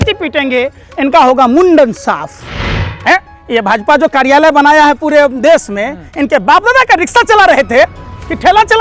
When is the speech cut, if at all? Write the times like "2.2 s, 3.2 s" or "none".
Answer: 2.8 s